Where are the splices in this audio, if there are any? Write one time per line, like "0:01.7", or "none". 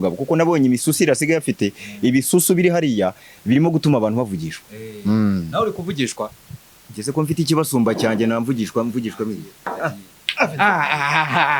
none